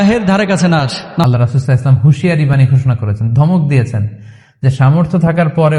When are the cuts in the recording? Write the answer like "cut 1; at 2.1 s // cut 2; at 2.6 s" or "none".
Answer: cut 1; at 1.2 s